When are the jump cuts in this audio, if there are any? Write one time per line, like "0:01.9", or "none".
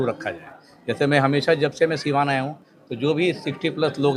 none